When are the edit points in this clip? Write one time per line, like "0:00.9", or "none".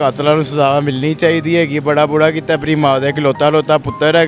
none